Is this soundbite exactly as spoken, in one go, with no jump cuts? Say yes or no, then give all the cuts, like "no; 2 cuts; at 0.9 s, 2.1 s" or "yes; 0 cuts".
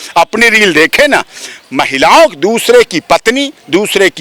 yes; 0 cuts